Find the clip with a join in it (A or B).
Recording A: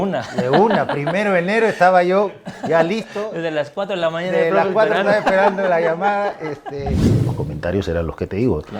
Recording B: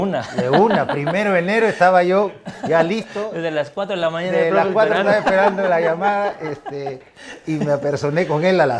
A